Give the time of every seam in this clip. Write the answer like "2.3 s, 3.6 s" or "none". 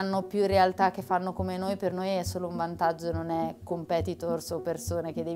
none